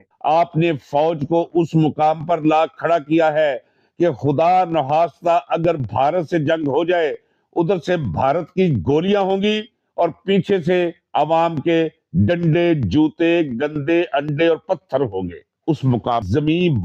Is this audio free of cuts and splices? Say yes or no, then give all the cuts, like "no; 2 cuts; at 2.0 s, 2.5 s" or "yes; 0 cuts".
yes; 0 cuts